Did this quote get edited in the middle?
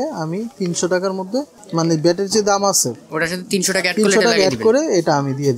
no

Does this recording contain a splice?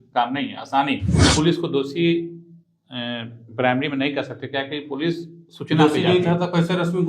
yes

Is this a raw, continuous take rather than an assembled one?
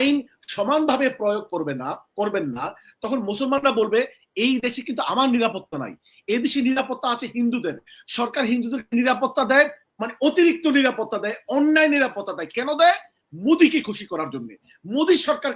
yes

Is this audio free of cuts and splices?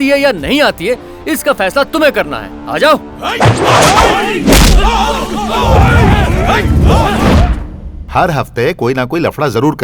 yes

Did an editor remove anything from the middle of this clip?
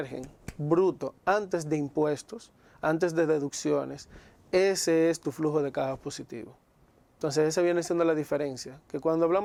no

